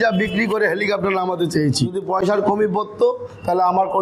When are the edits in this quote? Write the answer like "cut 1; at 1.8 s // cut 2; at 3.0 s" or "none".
cut 1; at 2.2 s

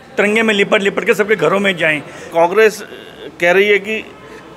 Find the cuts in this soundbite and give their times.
cut 1; at 2.3 s

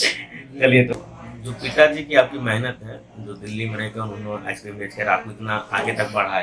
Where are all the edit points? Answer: cut 1; at 0.9 s

